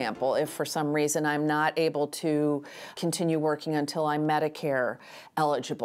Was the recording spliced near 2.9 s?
yes; 1 cut; at 2.9 s

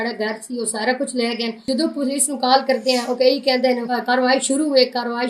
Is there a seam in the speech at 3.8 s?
yes; 2 cuts; at 1.6 s, 3.8 s

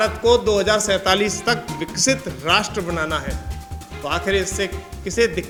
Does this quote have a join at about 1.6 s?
no; 0 cuts

